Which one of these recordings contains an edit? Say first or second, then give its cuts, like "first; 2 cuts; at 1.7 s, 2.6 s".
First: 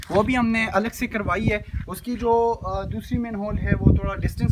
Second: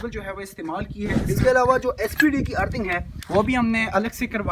second; 1 cut; at 1.0 s